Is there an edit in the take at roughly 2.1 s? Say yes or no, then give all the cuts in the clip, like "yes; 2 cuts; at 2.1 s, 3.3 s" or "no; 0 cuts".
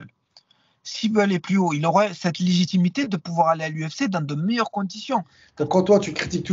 no; 1 cut; at 5.4 s